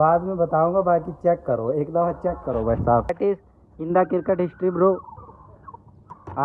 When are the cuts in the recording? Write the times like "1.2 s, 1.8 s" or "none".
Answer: 3.1 s